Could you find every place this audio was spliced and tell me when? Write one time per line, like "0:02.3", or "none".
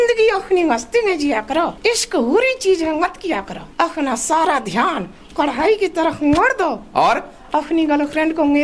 0:01.8
0:03.6